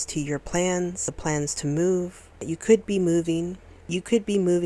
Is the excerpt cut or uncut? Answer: cut